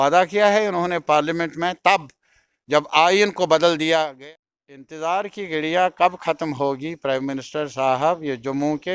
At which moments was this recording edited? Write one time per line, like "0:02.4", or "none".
0:04.1